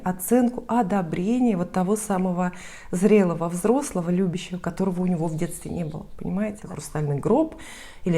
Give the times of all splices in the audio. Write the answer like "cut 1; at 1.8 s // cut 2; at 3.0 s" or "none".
cut 1; at 6.7 s

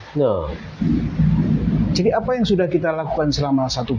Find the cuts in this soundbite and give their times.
none

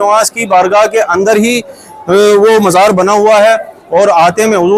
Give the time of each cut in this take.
none

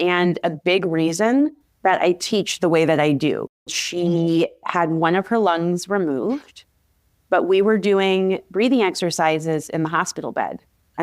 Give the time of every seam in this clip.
cut 1; at 3.6 s

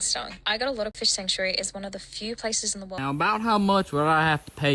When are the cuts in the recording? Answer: cut 1; at 0.9 s // cut 2; at 3.0 s

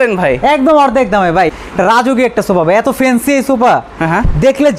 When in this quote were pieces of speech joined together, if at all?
cut 1; at 1.5 s

